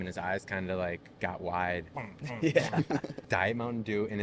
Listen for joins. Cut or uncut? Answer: cut